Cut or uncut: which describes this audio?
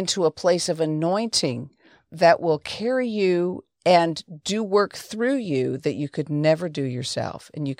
uncut